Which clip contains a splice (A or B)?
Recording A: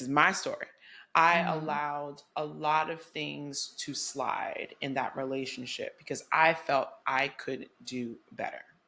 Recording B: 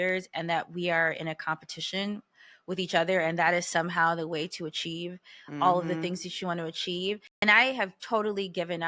B